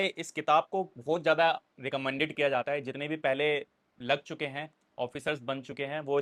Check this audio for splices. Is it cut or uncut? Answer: uncut